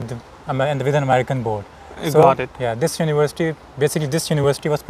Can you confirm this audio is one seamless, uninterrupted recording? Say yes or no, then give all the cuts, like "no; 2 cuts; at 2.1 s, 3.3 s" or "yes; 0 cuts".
yes; 0 cuts